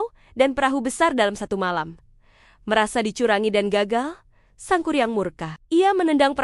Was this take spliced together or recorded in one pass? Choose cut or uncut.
cut